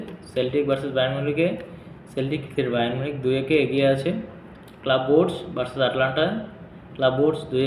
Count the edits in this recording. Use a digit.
0